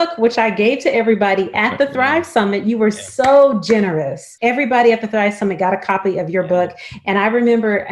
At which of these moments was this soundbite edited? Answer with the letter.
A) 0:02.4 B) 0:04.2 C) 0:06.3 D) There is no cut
B